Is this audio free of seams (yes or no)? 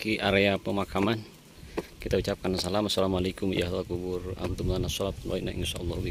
yes